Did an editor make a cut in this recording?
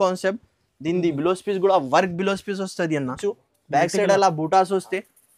yes; 1 cut; at 3.2 s

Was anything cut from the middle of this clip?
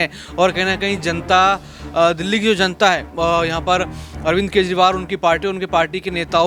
no; 0 cuts

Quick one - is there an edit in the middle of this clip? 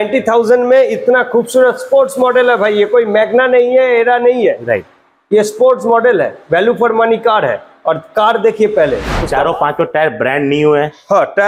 yes; 1 cut; at 9.1 s

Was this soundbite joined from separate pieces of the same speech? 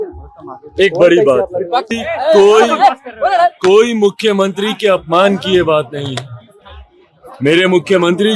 no; 0 cuts

